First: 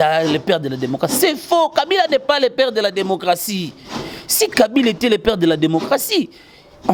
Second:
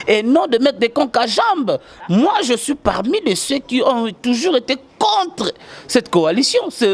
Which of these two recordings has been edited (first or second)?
second